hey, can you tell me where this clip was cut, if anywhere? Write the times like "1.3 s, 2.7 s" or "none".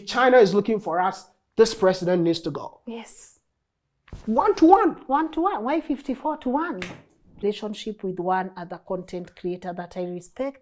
7.4 s